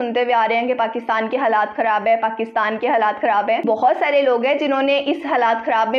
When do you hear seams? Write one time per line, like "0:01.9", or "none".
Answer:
0:03.6

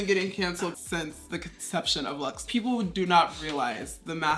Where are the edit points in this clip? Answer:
0:00.7
0:02.4

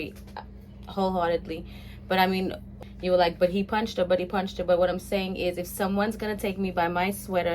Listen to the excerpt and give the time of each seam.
0:02.7

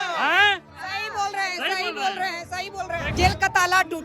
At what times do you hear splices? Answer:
0:03.1

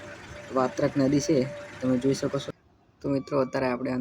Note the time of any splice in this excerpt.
0:02.5

